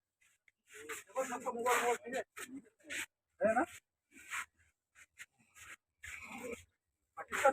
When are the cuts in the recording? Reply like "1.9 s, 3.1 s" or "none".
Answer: none